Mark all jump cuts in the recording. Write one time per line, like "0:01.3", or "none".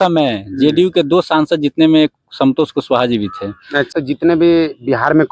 0:03.9